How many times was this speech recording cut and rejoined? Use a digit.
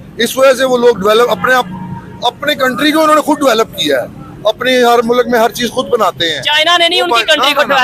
0